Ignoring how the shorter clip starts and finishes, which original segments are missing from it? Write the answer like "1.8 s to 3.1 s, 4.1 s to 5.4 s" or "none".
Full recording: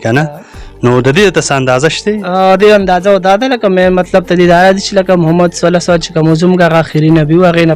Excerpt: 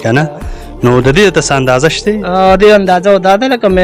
none